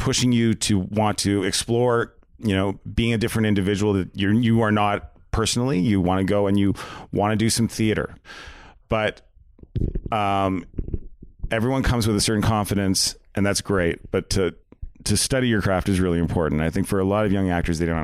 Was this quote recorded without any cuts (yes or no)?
no